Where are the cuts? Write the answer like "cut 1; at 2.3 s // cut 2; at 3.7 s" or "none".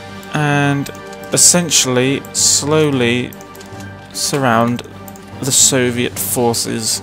cut 1; at 4.7 s